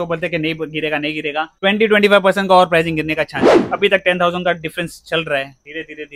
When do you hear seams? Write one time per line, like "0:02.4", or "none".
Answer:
0:03.6